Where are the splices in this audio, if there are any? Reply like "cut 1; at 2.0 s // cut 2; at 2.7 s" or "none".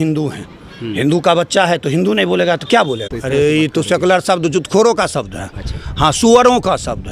cut 1; at 3.1 s